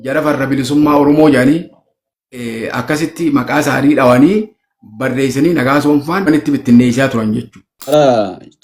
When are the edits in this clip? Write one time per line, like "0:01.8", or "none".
0:06.3
0:07.9

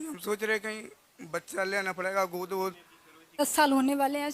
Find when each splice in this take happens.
0:03.4

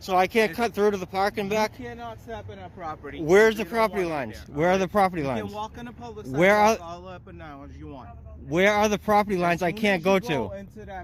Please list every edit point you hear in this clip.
none

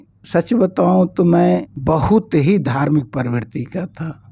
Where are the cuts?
0:01.7

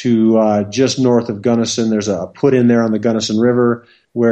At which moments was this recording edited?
none

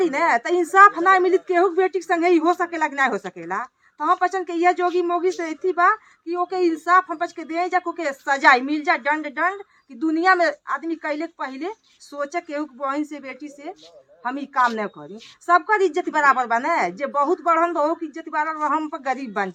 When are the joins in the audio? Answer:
none

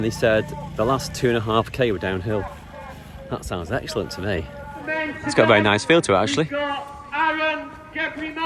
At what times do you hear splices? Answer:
0:04.9

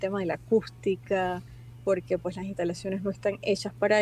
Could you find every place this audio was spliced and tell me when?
none

